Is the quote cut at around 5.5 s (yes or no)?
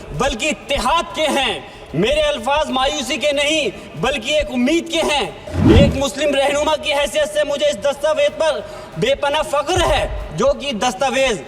yes